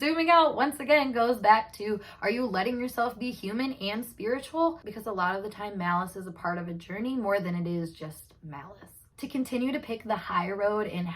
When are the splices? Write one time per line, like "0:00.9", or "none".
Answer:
0:04.8
0:09.1